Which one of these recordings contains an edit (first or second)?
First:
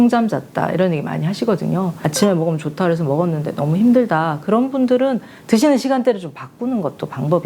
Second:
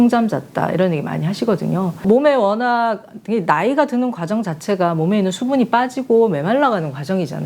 first